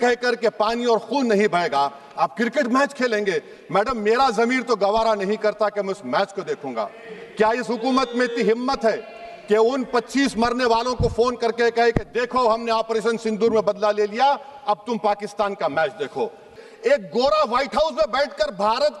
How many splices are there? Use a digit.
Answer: 1